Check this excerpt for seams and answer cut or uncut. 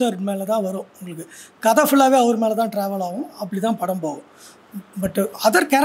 uncut